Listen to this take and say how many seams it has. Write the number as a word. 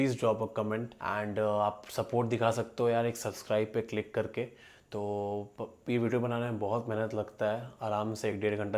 one